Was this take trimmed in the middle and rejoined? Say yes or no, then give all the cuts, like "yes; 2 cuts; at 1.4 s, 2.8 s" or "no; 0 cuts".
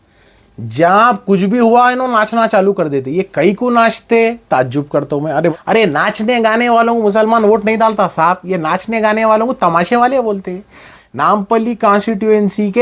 yes; 2 cuts; at 5.5 s, 10.9 s